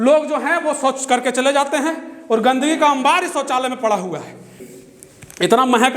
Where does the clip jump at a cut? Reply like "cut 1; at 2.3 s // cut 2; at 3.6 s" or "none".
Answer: cut 1; at 4.6 s

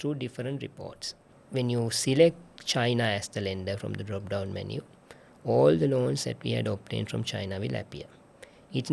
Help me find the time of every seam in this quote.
cut 1; at 1.3 s

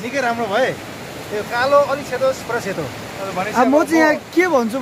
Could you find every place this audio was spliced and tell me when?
cut 1; at 3.2 s

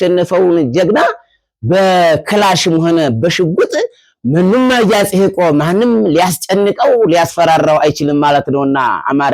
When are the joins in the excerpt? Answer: none

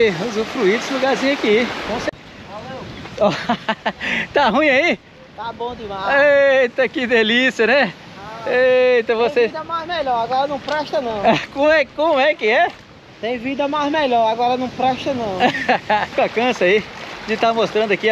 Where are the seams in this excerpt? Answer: cut 1; at 2.1 s // cut 2; at 16.1 s

